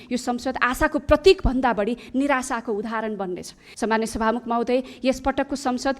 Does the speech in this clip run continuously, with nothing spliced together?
no; 1 cut; at 3.6 s

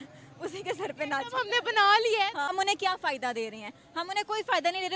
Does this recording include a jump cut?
yes; 1 cut; at 2.5 s

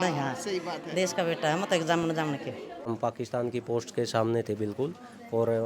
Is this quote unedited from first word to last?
no; 1 cut; at 2.9 s

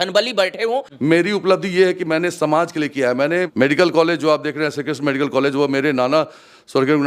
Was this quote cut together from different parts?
yes; 2 cuts; at 0.9 s, 3.5 s

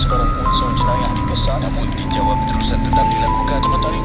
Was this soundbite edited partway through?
no; 0 cuts

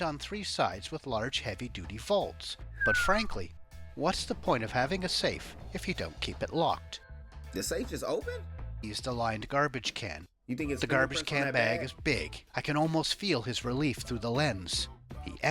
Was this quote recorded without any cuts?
no; 1 cut; at 8.9 s

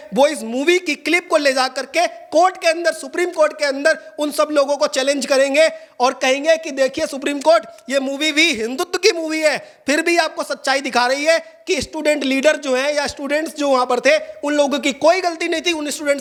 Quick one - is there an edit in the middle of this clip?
no; 0 cuts

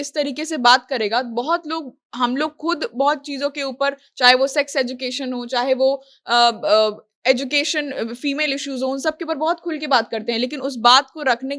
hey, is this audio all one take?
yes; 0 cuts

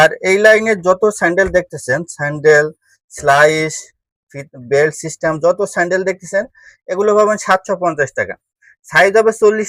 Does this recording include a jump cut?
no; 0 cuts

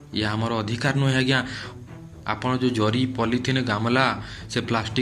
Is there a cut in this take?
yes; 1 cut; at 1.6 s

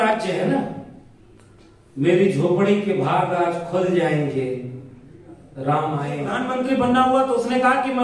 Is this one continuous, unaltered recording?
no; 1 cut; at 6.3 s

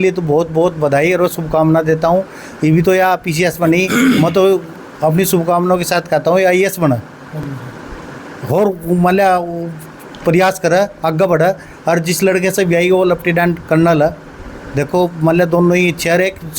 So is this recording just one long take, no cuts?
yes; 0 cuts

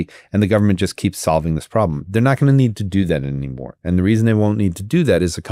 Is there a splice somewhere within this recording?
no; 0 cuts

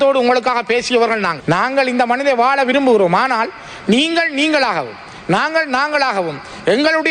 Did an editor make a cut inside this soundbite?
yes; 1 cut; at 1.4 s

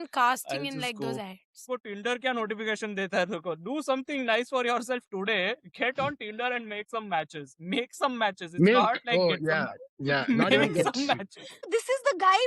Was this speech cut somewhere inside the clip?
yes; 2 cuts; at 1.6 s, 11.7 s

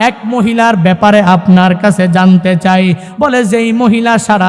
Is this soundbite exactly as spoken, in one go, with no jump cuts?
no; 1 cut; at 3.1 s

